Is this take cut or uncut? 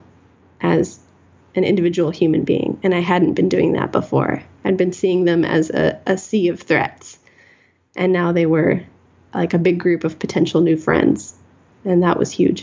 uncut